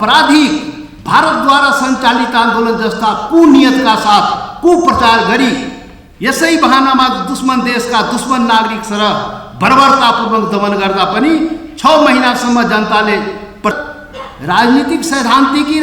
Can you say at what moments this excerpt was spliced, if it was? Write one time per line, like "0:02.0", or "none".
0:13.7